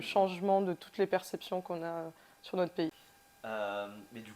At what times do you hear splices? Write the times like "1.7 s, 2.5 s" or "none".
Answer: none